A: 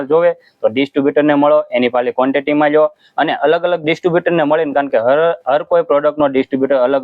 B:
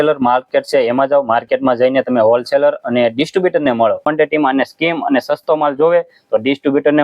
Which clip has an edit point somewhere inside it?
B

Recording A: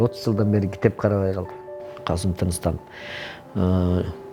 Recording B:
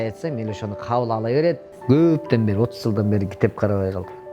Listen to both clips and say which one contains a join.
B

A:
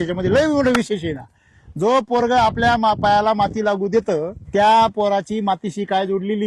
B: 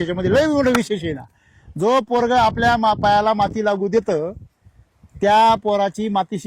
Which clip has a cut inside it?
A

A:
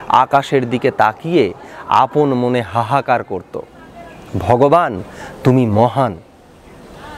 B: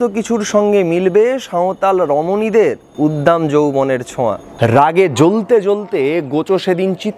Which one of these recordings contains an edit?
B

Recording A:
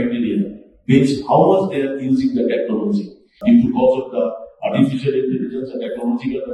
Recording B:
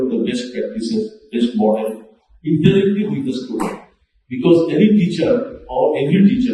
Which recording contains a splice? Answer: A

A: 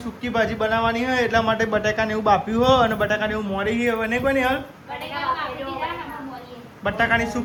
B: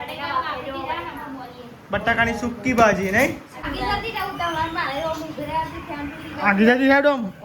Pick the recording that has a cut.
B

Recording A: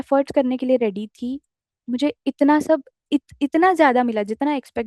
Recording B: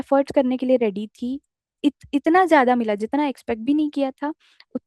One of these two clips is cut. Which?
B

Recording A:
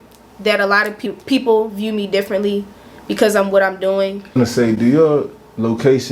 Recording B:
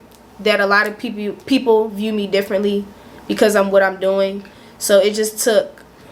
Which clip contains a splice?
A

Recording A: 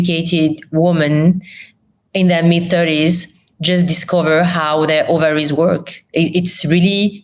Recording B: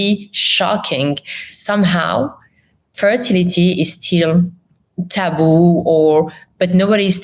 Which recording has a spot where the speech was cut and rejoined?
B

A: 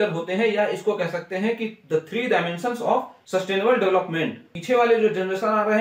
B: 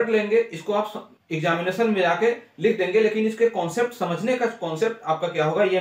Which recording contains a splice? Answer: A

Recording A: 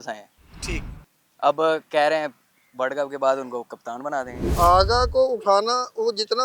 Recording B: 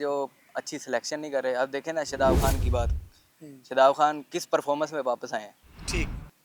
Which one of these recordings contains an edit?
A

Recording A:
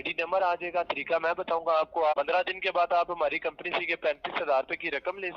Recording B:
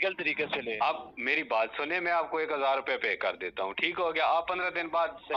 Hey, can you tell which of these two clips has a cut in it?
A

